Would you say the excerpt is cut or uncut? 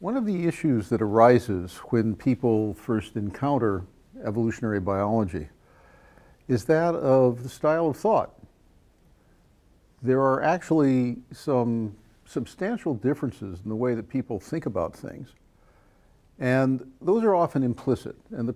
uncut